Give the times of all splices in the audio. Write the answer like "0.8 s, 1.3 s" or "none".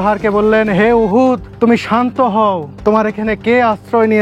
1.5 s, 2.7 s